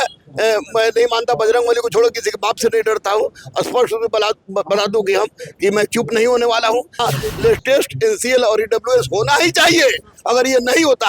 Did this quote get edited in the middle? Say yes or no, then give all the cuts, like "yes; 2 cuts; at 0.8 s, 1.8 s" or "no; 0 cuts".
yes; 1 cut; at 6.9 s